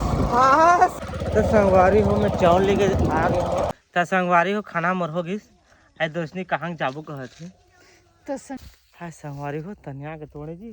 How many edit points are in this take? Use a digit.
3